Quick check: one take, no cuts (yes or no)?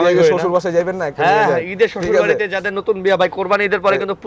yes